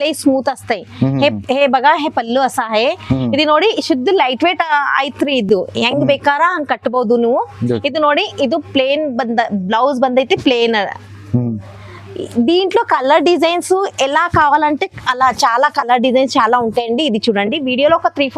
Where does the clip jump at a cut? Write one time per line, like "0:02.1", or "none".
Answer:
none

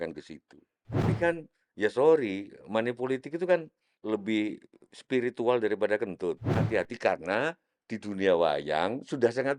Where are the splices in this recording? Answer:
0:01.1
0:03.9
0:06.5

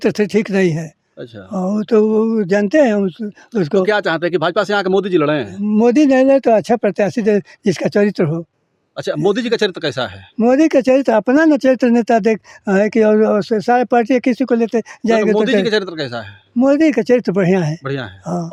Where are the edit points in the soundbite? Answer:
none

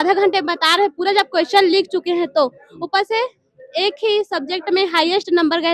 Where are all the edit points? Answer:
none

